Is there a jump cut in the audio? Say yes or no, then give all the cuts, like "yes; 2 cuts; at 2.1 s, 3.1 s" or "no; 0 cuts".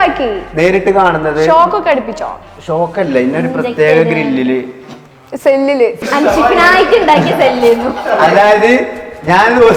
yes; 1 cut; at 6.0 s